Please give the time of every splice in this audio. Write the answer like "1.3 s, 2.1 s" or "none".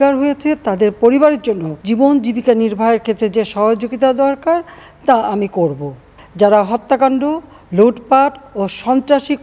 1.7 s, 6.1 s